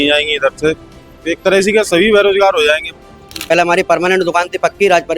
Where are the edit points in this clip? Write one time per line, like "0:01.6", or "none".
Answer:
0:03.3